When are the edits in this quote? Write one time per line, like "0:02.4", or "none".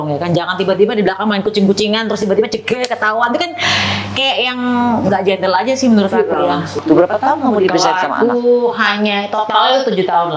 0:06.8